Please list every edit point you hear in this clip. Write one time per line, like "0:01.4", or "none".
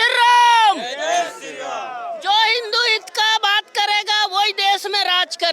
none